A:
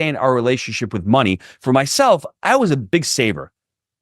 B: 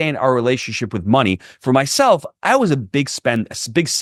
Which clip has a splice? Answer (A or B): A